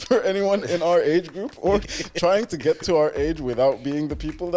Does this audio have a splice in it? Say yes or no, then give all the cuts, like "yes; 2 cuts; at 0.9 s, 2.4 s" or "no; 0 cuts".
yes; 1 cut; at 1.9 s